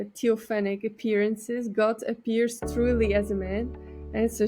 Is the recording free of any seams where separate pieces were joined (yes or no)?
yes